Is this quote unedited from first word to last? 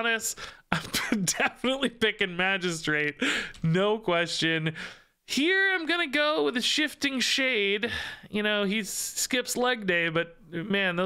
yes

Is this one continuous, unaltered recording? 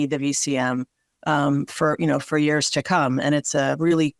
yes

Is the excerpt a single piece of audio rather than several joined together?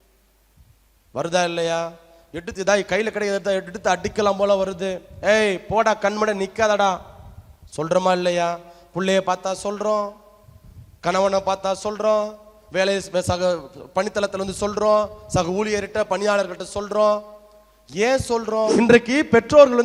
no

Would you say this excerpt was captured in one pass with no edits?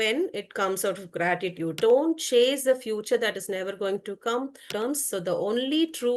no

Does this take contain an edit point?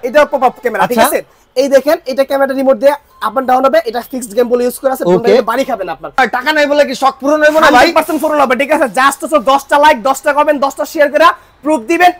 yes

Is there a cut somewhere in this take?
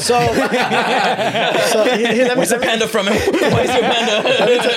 no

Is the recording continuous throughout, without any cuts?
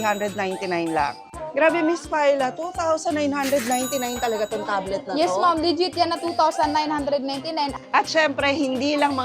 no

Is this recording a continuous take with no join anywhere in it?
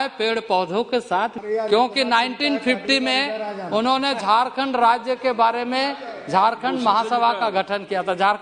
no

